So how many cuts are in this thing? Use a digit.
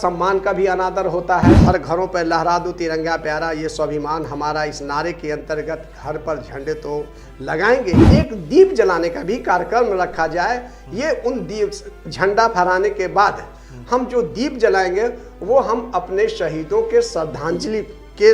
2